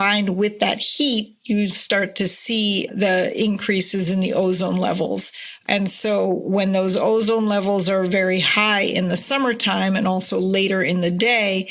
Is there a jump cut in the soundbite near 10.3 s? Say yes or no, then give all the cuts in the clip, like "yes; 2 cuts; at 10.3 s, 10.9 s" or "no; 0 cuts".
no; 0 cuts